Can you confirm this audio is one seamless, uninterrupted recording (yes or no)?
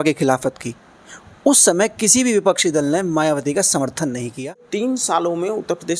no